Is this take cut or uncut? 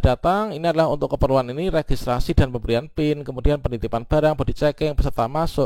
uncut